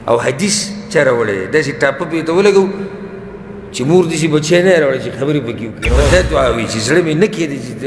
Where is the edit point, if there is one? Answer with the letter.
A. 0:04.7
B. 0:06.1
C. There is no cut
B